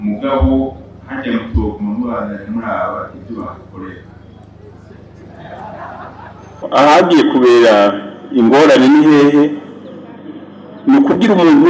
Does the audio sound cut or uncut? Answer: cut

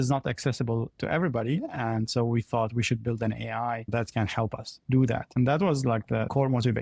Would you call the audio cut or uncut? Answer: uncut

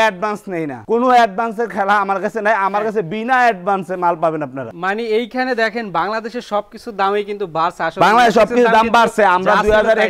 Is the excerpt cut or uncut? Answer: uncut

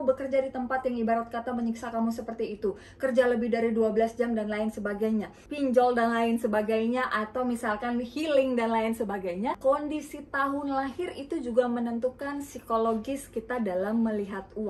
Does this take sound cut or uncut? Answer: cut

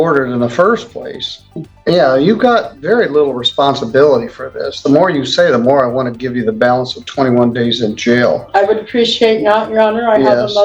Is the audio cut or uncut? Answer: cut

